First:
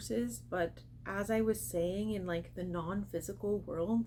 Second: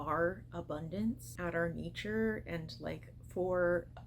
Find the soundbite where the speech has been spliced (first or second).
second